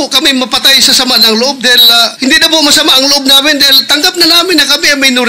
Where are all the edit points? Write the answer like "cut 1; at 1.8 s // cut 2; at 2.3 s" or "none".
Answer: cut 1; at 2.1 s